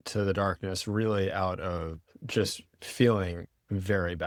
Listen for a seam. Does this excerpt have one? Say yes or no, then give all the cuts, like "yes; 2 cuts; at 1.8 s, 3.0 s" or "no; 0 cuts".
no; 0 cuts